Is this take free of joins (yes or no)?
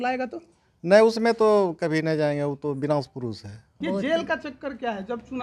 no